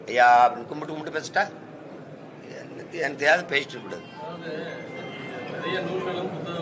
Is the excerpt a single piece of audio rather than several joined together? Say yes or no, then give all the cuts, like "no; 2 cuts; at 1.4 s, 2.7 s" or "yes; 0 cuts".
yes; 0 cuts